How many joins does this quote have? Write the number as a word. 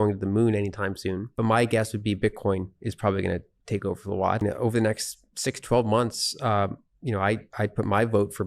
two